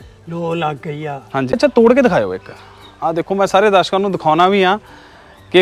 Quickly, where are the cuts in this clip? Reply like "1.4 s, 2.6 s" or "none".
1.6 s